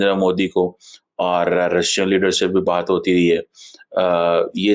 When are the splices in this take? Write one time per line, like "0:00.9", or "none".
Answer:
none

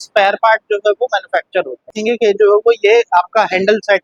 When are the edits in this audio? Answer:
0:01.9

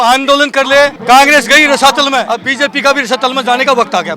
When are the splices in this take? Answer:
0:01.0
0:02.3

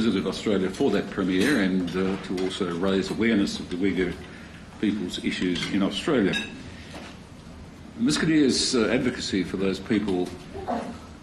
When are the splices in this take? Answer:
none

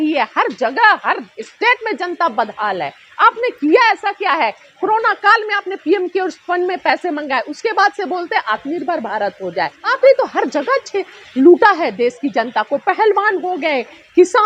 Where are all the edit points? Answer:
0:09.8

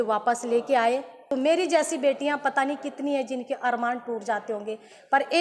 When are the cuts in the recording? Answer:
0:01.3

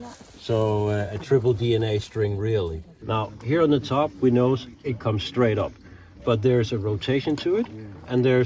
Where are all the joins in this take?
0:02.8

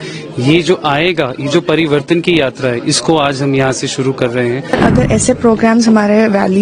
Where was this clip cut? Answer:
0:04.7

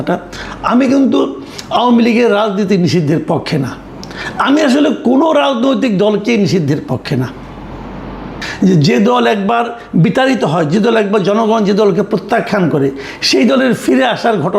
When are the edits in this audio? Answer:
0:08.3

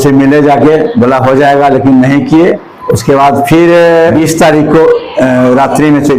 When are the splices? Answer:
0:02.7
0:04.1

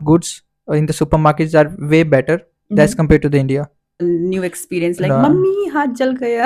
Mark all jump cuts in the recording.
0:04.0

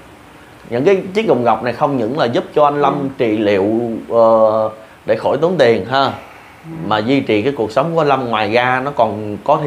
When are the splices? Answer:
none

